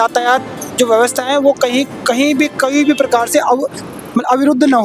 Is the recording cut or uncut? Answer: uncut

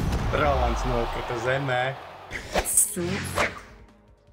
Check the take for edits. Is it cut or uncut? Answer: cut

